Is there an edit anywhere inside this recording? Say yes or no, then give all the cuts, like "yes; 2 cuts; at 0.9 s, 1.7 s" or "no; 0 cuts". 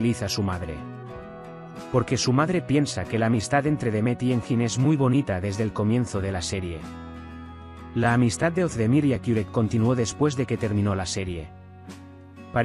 no; 0 cuts